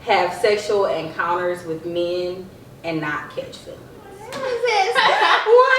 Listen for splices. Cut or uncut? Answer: cut